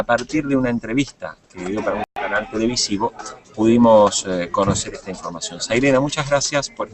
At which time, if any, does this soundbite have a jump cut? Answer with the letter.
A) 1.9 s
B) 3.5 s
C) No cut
A